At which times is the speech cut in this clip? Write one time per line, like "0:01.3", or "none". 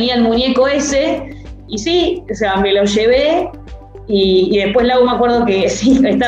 0:01.7